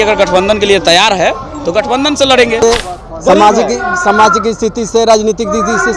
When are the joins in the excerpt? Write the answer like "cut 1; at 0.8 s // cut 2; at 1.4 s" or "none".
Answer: cut 1; at 2.6 s

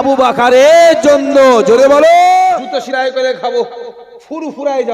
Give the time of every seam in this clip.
cut 1; at 2.7 s

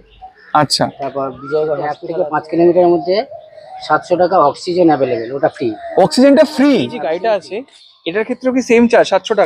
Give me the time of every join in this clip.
cut 1; at 2.0 s // cut 2; at 7.0 s

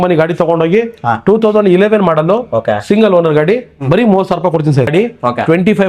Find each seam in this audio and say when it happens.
cut 1; at 4.9 s

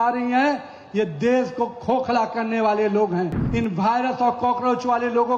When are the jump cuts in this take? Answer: cut 1; at 3.4 s

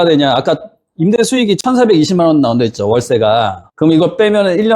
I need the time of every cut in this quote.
cut 1; at 3.6 s

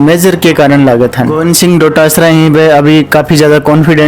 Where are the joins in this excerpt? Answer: cut 1; at 1.3 s

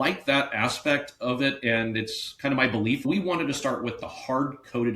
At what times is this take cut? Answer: cut 1; at 3.0 s

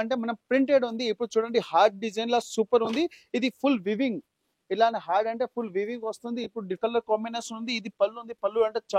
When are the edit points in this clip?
cut 1; at 6.8 s

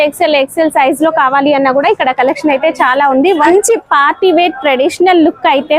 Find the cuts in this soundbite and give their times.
cut 1; at 3.5 s

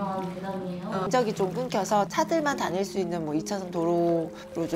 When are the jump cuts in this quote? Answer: cut 1; at 1.1 s

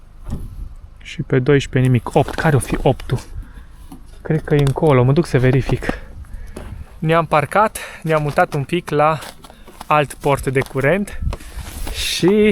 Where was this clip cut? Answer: none

